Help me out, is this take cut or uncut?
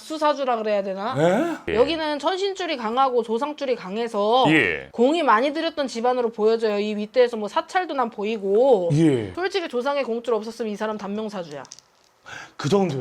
cut